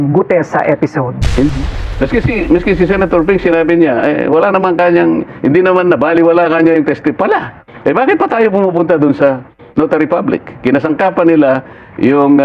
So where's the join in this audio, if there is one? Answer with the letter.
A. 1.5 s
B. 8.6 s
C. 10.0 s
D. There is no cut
A